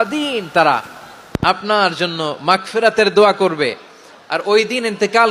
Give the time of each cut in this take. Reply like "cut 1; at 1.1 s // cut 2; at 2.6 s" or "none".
none